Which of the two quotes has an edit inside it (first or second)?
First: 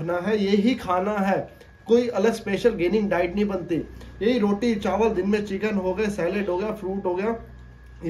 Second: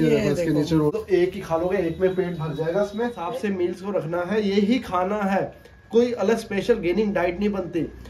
second